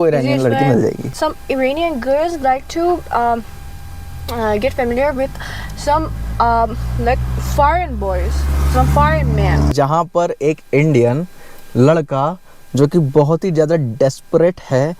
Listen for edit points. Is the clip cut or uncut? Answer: cut